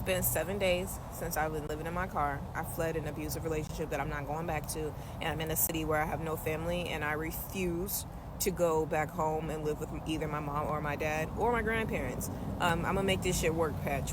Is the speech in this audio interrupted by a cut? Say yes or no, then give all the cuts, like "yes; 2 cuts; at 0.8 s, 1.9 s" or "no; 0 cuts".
no; 0 cuts